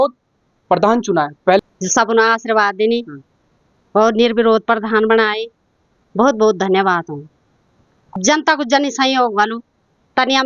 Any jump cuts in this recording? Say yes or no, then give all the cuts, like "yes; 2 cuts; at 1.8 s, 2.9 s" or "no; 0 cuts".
yes; 2 cuts; at 1.5 s, 8.1 s